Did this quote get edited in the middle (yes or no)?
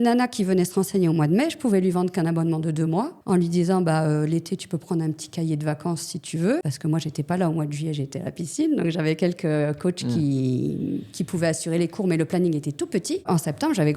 yes